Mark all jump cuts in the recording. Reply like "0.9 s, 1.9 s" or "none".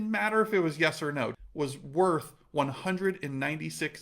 1.3 s